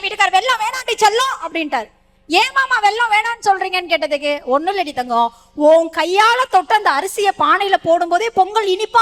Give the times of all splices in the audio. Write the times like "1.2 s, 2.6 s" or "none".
none